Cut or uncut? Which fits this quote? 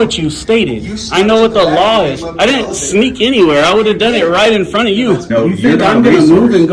cut